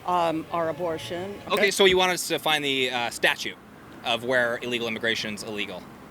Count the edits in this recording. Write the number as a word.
one